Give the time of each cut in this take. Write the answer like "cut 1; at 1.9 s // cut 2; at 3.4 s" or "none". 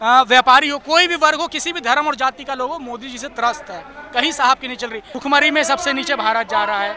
cut 1; at 5.1 s